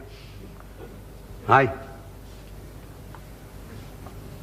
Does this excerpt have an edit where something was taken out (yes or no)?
no